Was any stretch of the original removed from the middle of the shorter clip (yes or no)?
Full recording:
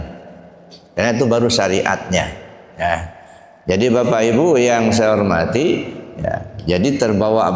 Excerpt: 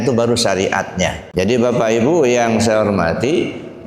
yes